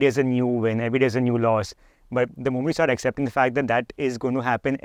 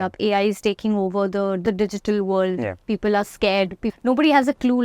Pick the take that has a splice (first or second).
second